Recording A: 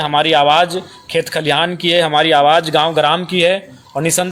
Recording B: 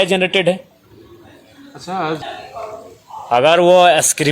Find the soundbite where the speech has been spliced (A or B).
B